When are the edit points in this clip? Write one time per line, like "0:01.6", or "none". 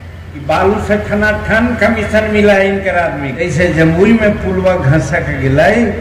0:03.3

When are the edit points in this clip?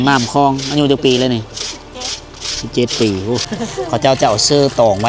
0:03.5

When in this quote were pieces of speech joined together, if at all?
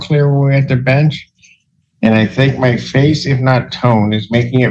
0:03.2

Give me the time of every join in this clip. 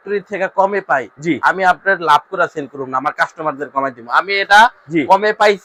none

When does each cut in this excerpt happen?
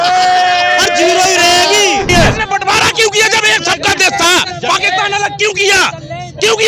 0:02.1

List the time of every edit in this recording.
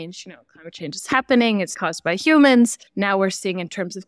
0:01.8
0:02.8

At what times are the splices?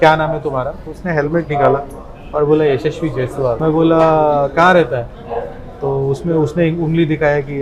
0:03.6

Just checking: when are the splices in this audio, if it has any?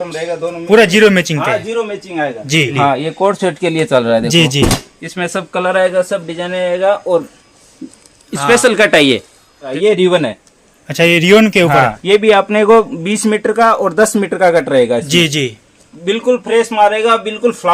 0:02.7
0:09.7
0:12.0

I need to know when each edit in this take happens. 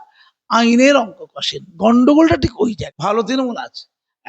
0:02.9

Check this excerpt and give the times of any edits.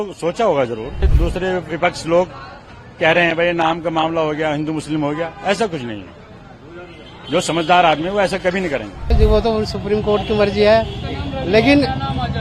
0:01.1
0:09.0

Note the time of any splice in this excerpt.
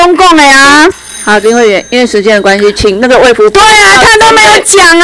0:00.9

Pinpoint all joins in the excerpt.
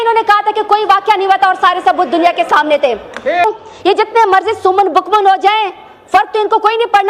0:03.4

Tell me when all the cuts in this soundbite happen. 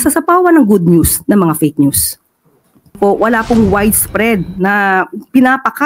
0:03.0

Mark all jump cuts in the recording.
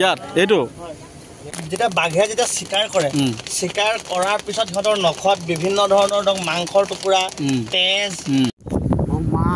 0:01.5
0:08.6

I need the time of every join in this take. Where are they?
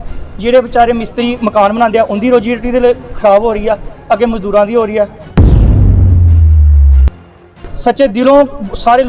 0:05.2
0:07.6

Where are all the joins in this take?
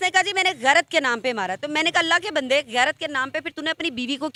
none

